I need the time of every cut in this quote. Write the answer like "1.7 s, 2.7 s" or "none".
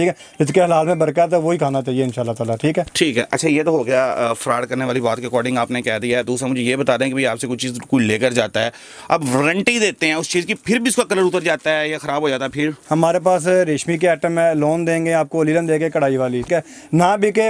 none